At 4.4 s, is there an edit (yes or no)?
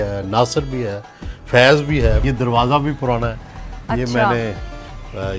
no